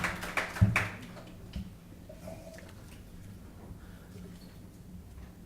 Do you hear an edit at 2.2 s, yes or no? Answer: yes